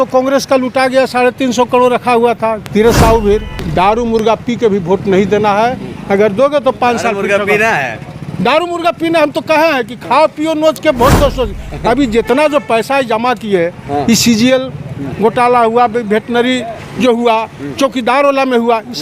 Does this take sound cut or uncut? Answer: cut